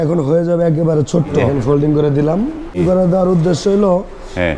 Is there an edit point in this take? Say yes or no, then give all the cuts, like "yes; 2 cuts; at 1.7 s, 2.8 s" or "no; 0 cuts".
yes; 2 cuts; at 1.5 s, 2.8 s